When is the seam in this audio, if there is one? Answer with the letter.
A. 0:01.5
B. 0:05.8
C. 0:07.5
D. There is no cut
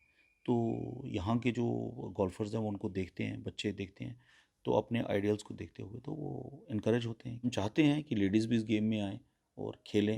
C